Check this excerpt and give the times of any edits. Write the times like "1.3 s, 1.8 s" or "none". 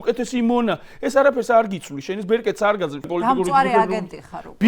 3.1 s